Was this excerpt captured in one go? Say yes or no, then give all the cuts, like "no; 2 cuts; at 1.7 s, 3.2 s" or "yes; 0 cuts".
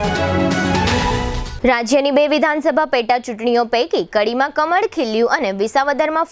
no; 1 cut; at 0.9 s